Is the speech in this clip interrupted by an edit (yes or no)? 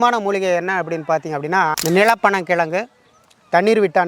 yes